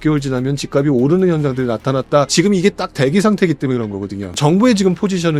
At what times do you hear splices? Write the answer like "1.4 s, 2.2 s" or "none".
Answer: 2.3 s, 4.3 s